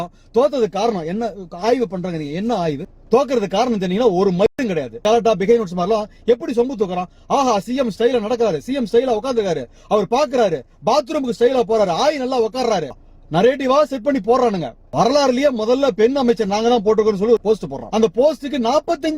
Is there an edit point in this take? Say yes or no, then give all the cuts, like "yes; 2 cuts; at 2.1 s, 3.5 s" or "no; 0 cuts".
yes; 5 cuts; at 2.9 s, 4.5 s, 12.9 s, 14.8 s, 17.4 s